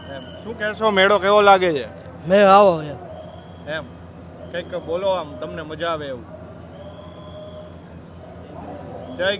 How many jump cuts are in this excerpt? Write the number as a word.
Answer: zero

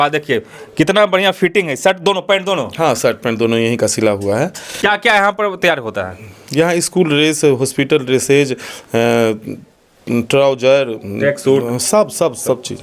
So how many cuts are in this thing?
zero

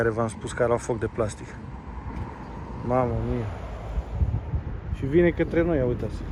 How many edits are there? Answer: zero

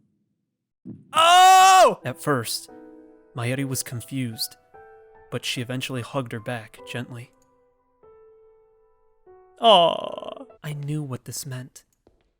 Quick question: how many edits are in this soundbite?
two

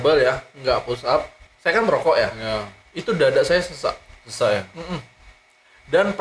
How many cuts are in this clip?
one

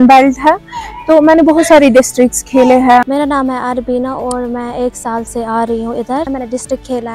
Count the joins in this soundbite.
two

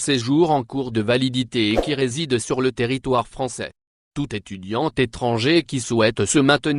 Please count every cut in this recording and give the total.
one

